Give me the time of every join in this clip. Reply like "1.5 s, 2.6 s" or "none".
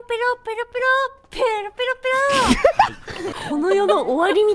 none

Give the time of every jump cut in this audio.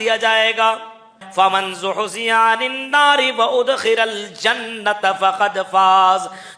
1.2 s

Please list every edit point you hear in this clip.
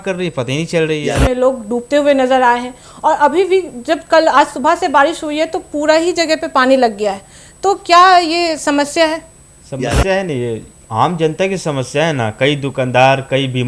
1.1 s

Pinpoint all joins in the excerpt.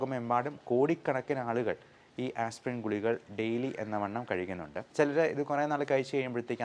4.7 s

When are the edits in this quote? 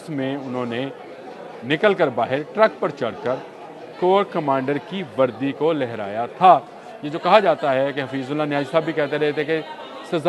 none

